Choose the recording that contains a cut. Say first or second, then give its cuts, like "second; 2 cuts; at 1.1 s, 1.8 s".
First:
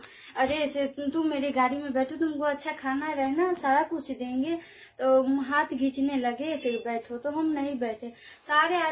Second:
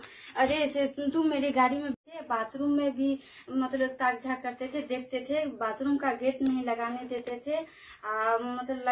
second; 1 cut; at 1.9 s